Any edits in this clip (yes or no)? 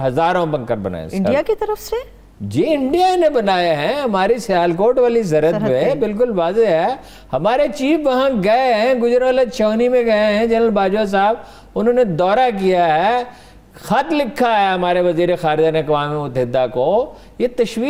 no